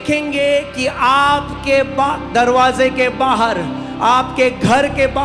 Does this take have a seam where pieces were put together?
no; 0 cuts

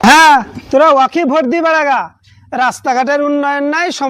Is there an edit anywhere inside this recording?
no; 0 cuts

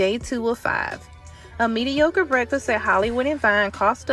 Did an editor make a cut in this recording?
no; 0 cuts

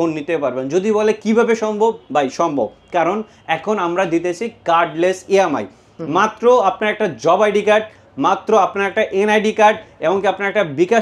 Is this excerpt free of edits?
yes; 0 cuts

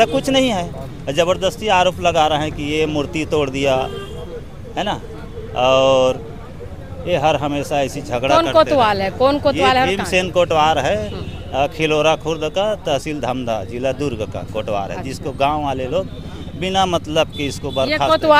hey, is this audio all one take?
yes; 0 cuts

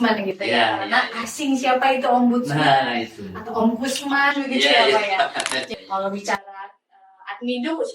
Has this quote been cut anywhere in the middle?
yes; 1 cut; at 5.6 s

